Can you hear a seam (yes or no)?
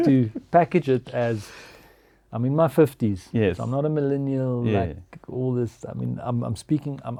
no